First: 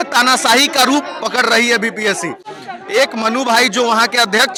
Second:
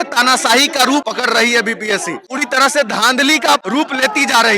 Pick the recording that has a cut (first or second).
second